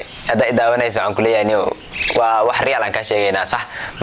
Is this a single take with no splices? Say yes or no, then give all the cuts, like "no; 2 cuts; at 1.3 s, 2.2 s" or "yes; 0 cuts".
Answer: yes; 0 cuts